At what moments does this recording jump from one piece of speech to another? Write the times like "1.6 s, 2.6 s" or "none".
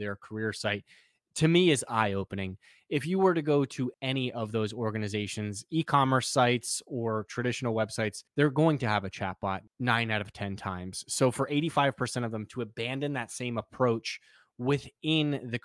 4.0 s, 8.2 s, 9.7 s